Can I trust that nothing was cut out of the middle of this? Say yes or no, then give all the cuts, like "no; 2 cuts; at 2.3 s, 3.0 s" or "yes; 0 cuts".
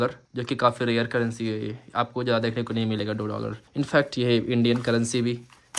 yes; 0 cuts